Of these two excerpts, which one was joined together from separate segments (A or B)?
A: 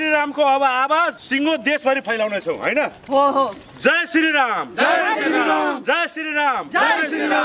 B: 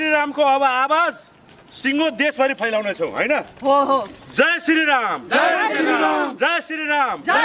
A